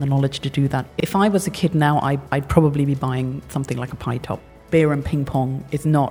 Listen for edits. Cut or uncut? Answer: cut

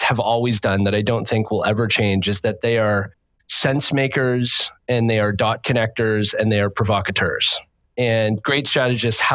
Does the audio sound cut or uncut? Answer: uncut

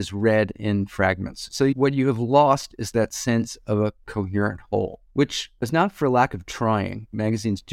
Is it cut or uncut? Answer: uncut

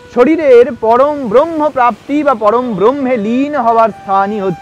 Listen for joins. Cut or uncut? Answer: uncut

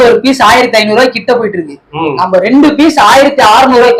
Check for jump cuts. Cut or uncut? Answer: uncut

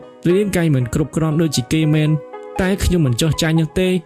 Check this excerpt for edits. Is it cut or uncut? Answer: uncut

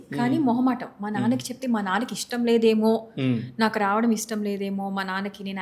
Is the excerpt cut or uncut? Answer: uncut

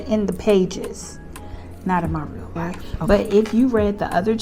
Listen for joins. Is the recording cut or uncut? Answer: cut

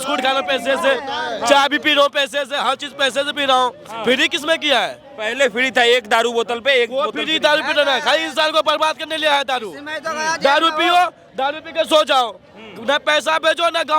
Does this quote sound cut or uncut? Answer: uncut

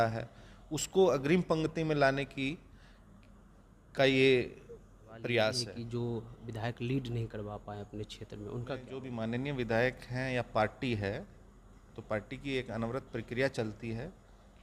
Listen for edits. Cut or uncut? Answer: cut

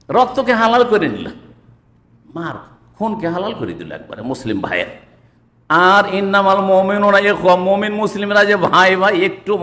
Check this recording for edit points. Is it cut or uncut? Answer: uncut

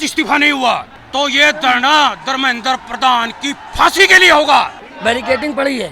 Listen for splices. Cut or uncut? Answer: cut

